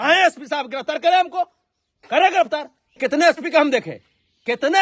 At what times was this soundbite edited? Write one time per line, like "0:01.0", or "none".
0:03.0